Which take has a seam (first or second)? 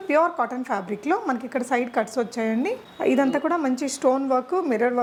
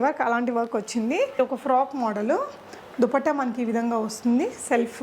second